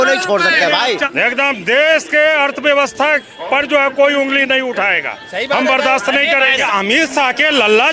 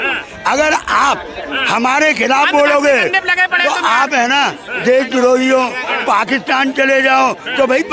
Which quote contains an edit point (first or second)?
first